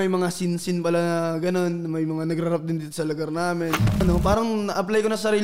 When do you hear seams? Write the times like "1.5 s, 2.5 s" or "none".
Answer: 4.0 s